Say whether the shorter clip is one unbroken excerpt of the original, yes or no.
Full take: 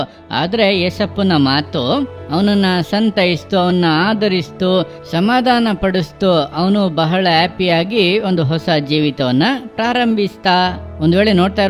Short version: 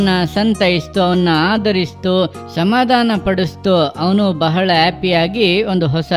yes